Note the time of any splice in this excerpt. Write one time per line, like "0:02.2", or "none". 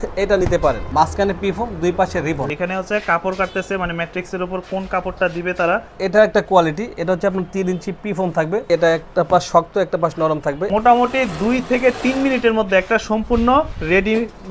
0:00.9
0:02.5
0:06.0
0:08.7
0:10.6